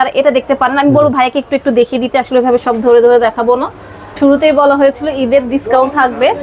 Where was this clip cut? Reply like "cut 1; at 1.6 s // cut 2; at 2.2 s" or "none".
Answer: cut 1; at 4.0 s